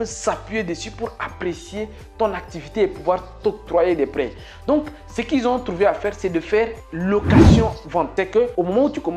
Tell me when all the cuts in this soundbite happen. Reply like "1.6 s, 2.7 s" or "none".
8.1 s